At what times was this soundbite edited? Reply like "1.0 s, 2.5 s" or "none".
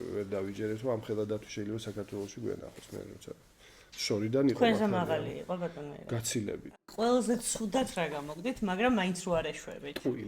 6.6 s